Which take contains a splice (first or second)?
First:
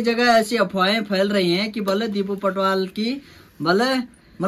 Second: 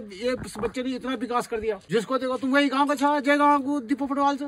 second